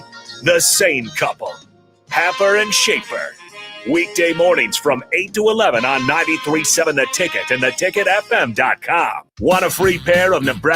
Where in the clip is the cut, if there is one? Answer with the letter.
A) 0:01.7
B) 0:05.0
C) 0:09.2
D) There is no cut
C